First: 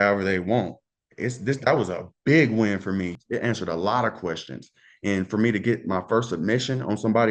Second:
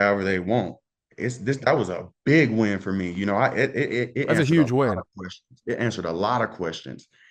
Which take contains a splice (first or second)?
first